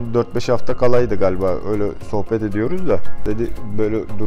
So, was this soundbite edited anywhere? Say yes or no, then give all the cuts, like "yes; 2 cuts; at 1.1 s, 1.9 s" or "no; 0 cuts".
yes; 1 cut; at 3.1 s